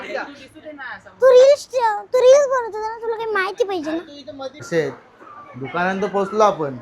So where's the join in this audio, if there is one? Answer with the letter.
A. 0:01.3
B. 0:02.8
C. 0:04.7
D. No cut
C